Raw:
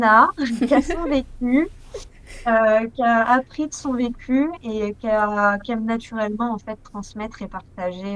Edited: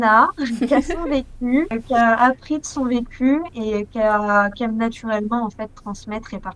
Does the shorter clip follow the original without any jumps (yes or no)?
no